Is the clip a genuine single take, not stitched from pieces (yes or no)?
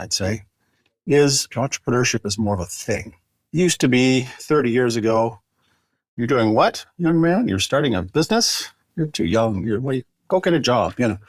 no